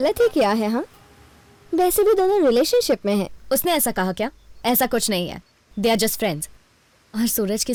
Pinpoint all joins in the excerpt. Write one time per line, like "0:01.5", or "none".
none